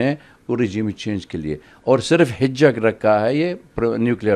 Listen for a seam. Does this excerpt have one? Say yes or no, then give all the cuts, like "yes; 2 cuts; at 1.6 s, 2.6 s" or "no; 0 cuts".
no; 0 cuts